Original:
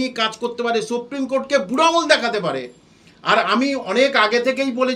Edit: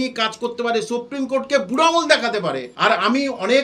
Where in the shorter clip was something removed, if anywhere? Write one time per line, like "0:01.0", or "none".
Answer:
0:02.7